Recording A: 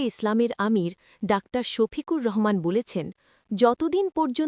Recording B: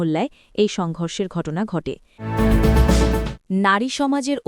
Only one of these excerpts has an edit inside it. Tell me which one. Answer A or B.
B